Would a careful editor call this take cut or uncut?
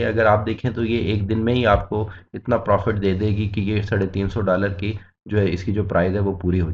uncut